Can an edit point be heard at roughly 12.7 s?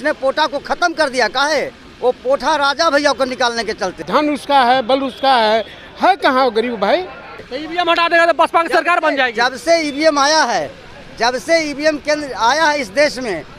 no; 2 cuts; at 4.0 s, 7.5 s

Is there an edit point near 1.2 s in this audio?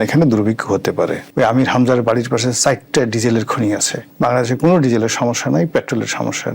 yes; 2 cuts; at 1.2 s, 4.0 s

